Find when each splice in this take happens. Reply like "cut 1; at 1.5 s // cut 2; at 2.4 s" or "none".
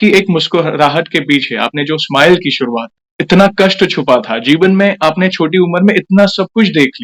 none